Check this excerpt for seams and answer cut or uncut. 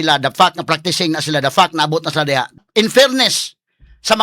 cut